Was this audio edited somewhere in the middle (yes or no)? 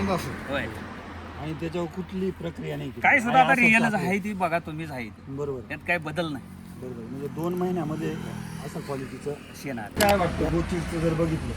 yes